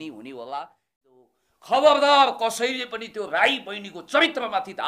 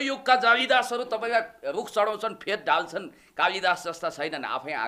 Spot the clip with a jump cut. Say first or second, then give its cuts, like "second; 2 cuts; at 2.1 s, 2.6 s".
first; 1 cut; at 1.2 s